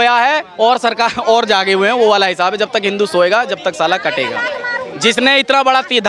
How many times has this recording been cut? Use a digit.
0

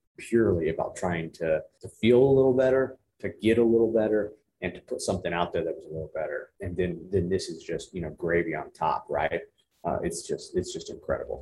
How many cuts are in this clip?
2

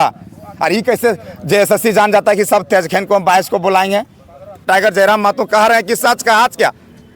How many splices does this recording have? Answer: 1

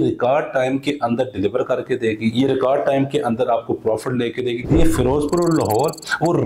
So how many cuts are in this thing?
1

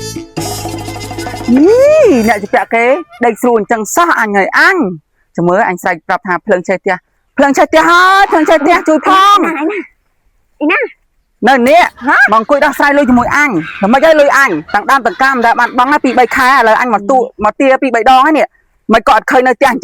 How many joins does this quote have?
1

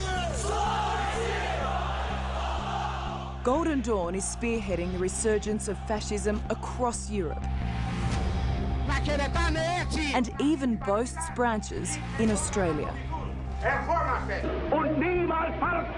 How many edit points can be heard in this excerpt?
1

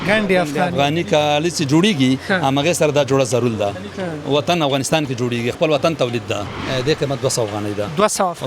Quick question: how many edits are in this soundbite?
1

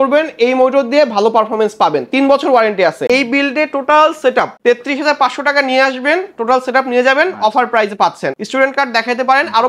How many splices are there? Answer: 3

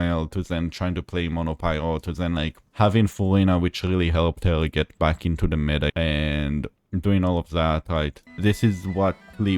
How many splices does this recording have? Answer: 2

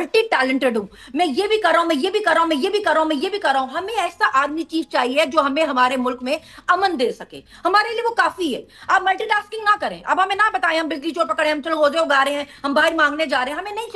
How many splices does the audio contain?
0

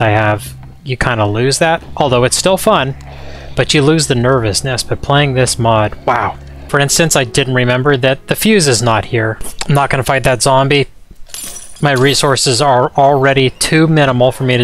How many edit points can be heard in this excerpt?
2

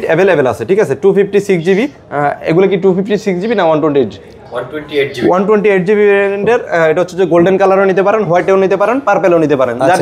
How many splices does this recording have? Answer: 0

